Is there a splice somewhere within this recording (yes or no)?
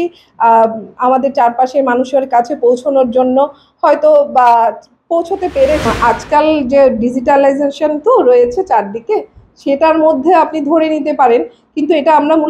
yes